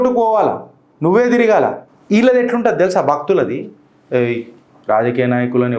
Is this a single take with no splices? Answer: no; 1 cut; at 1.9 s

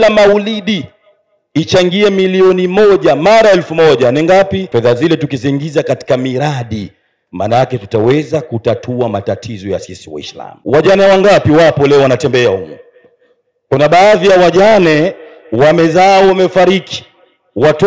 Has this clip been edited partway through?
yes; 2 cuts; at 4.7 s, 10.4 s

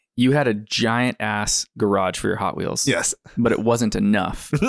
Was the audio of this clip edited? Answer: no; 0 cuts

